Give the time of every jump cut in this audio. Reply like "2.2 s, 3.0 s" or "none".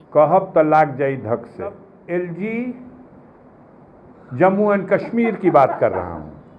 1.9 s